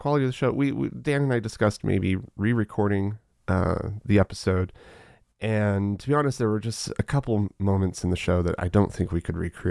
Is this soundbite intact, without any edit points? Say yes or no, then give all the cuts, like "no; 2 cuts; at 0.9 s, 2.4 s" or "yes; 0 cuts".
yes; 0 cuts